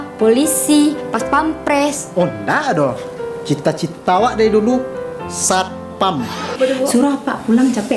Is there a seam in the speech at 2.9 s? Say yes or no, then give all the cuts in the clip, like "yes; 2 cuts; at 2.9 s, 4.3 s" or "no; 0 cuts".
no; 1 cut; at 6.6 s